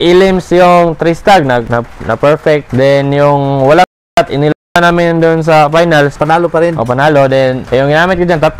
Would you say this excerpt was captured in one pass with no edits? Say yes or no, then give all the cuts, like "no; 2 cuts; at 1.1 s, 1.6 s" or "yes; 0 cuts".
yes; 0 cuts